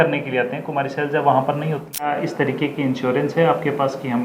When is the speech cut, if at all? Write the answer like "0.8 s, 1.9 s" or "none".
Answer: 2.1 s